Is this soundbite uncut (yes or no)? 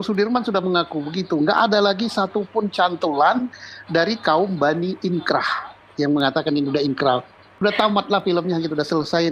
yes